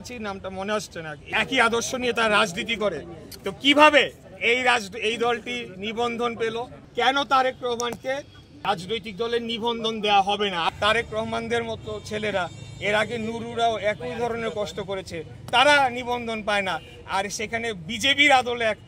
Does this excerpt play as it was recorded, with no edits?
no; 4 cuts; at 1.3 s, 6.8 s, 8.7 s, 10.7 s

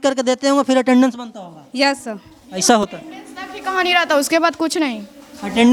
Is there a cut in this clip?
no; 0 cuts

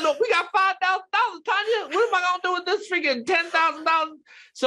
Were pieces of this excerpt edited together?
no; 0 cuts

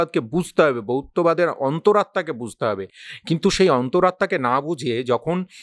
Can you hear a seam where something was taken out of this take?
no; 0 cuts

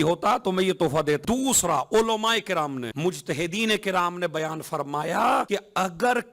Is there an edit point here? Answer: yes; 3 cuts; at 1.2 s, 2.9 s, 5.5 s

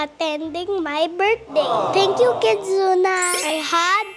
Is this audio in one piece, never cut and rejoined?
no; 2 cuts; at 1.9 s, 3.4 s

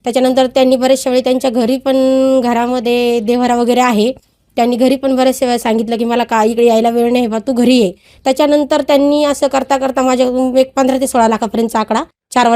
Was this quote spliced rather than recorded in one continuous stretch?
yes; 1 cut; at 8.1 s

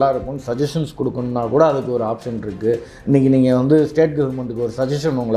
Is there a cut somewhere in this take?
no; 0 cuts

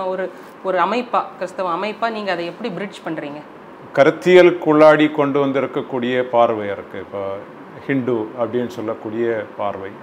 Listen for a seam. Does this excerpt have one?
no; 0 cuts

